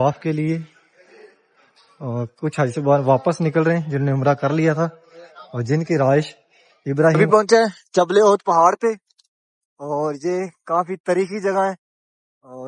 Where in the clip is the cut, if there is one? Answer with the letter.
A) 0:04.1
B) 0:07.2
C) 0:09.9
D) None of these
B